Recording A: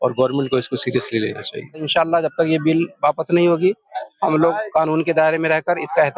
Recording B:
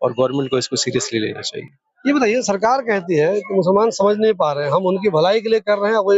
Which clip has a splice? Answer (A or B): A